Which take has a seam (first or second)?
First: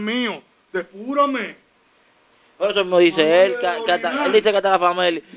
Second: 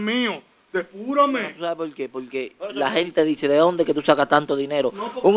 second